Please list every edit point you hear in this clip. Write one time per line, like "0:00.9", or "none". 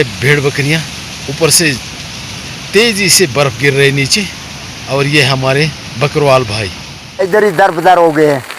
0:07.2